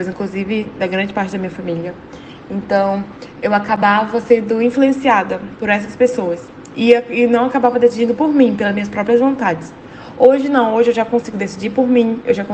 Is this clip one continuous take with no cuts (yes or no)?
yes